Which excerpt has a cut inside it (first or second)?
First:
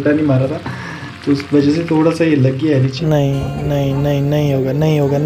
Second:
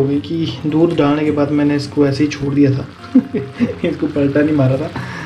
first